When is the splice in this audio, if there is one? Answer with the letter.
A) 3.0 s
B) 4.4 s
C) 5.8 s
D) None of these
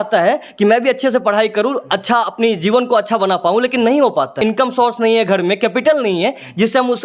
B